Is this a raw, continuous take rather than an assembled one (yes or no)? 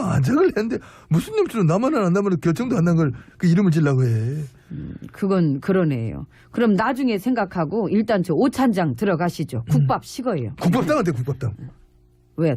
yes